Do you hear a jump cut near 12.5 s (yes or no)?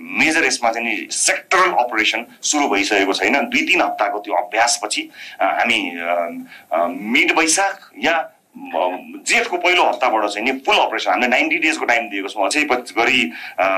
yes